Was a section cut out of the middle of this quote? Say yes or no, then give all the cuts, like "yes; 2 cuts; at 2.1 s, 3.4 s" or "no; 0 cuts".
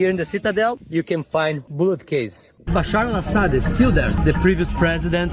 yes; 1 cut; at 2.7 s